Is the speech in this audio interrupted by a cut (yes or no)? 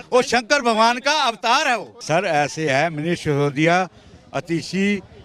yes